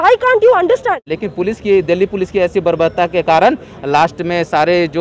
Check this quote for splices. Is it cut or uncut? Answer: cut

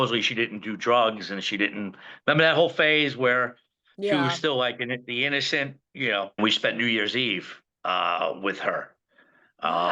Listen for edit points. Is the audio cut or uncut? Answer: cut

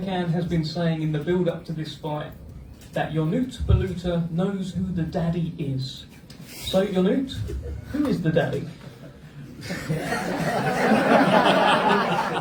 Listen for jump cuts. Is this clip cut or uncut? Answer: uncut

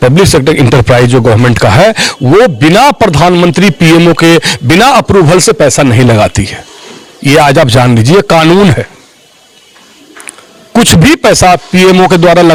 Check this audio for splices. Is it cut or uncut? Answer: uncut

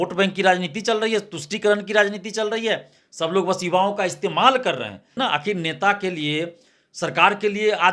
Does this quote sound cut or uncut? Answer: cut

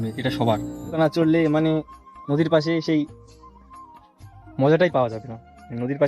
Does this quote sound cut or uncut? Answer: cut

